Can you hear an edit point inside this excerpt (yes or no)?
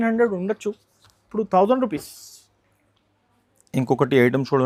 no